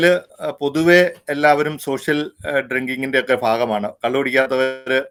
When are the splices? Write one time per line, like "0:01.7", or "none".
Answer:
none